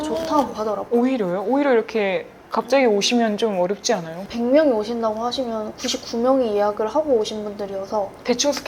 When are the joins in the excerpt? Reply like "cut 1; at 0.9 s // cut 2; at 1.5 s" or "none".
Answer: cut 1; at 4.3 s